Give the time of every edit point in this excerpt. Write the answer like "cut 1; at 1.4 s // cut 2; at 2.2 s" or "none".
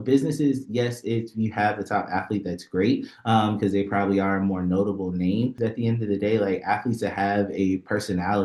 cut 1; at 5.5 s